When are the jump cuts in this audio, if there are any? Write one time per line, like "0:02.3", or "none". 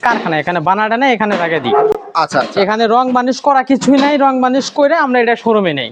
none